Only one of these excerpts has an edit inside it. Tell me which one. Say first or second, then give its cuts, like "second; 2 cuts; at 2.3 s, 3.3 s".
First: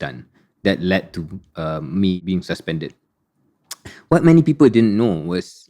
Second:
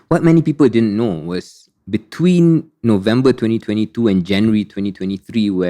first; 1 cut; at 2.2 s